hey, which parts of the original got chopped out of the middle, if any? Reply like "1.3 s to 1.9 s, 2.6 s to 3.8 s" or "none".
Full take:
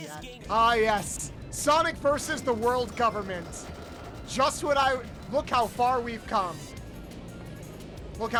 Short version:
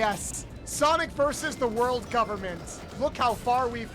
3.7 s to 5.2 s